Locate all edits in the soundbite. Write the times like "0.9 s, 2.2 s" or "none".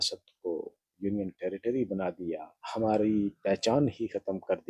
2.6 s

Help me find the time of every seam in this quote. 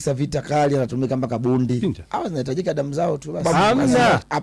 1.8 s, 3.4 s

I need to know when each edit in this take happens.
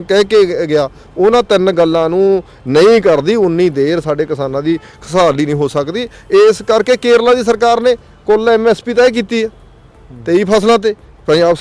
none

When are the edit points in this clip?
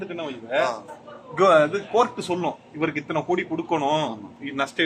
none

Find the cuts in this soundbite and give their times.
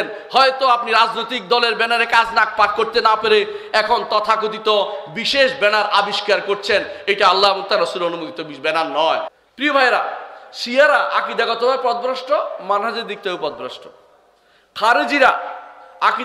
9.3 s

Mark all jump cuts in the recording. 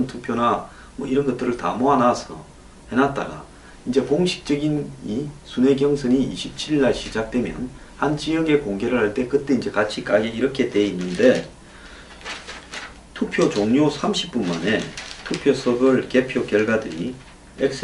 15.2 s

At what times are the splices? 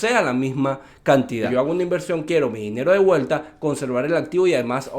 1.5 s

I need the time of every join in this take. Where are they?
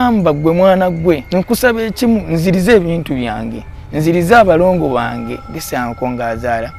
1.2 s

